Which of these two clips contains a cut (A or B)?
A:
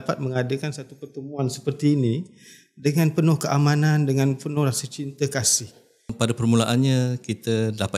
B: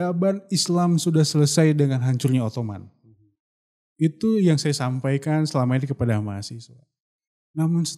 A